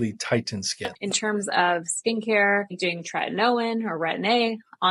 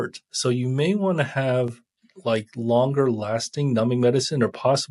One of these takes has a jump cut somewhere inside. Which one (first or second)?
first